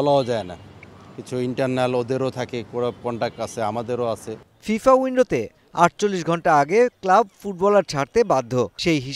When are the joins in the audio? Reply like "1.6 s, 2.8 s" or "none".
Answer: none